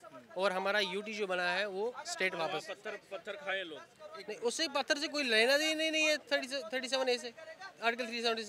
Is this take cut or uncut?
uncut